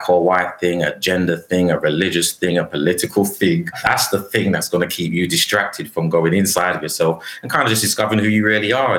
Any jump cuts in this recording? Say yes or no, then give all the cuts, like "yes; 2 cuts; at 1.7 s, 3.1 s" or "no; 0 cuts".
yes; 1 cut; at 3.8 s